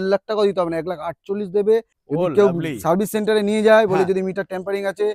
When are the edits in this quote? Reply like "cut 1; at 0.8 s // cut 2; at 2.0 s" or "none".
cut 1; at 2.0 s